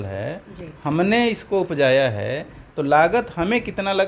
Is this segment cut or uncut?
uncut